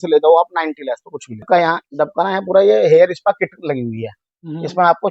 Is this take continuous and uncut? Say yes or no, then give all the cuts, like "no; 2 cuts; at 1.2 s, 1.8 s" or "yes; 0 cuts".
no; 1 cut; at 1.4 s